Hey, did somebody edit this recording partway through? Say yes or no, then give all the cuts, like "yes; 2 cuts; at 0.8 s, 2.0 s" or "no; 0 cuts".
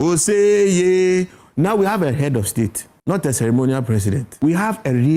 yes; 2 cuts; at 2.9 s, 4.3 s